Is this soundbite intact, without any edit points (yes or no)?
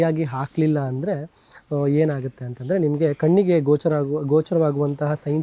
yes